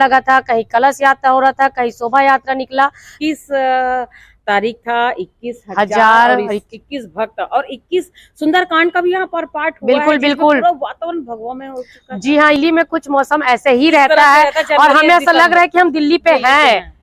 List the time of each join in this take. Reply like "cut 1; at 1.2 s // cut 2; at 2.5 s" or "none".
cut 1; at 3.1 s // cut 2; at 12.6 s